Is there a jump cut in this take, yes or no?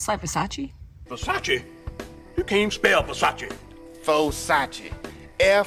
no